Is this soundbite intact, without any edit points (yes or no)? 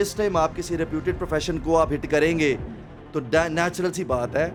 yes